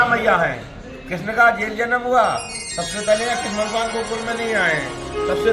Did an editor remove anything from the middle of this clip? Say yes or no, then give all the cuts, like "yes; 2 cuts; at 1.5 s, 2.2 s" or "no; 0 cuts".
no; 0 cuts